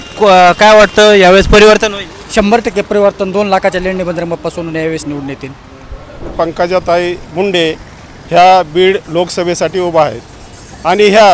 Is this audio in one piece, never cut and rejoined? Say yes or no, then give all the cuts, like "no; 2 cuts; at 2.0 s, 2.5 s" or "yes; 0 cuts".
no; 1 cut; at 6.3 s